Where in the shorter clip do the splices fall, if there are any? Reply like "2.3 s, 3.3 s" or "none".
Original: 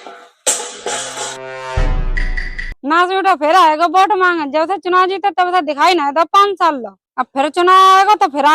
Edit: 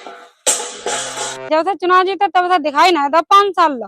1.5 s

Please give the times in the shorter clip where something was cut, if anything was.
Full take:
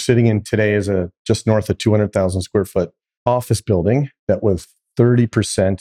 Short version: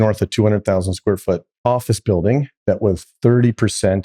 1.5 s, 3.1 s

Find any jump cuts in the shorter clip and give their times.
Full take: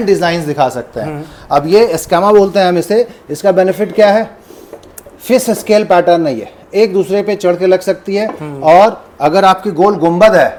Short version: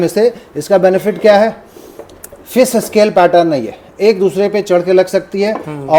none

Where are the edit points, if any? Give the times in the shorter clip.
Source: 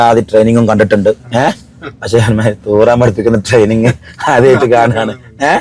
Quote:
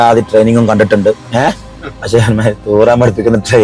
none

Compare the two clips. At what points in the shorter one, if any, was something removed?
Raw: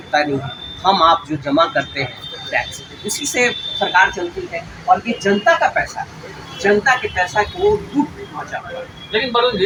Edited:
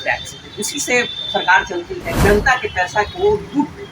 2.0 s

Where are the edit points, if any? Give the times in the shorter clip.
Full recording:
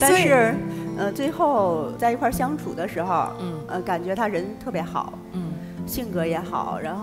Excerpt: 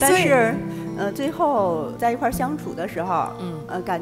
none

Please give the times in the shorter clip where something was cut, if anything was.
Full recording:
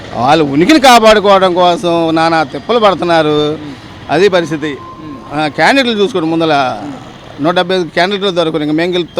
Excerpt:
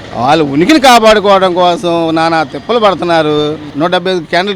3.6 s

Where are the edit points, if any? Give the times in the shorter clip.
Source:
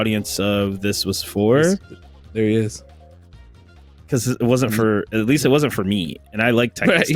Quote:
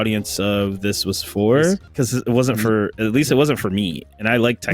1.9 s

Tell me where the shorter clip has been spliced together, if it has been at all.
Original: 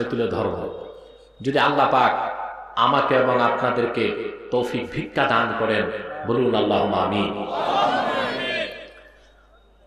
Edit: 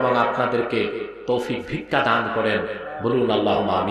none

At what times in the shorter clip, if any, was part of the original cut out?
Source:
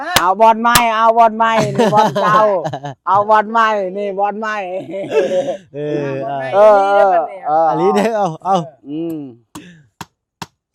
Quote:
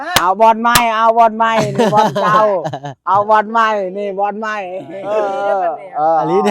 5.0 s

